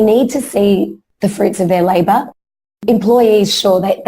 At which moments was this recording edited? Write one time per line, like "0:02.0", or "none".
0:01.0
0:02.6